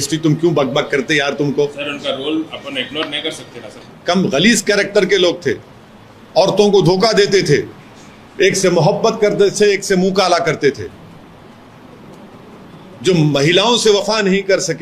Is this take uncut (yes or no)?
no